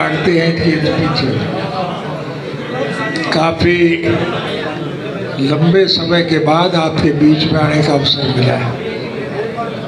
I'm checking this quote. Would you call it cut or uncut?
uncut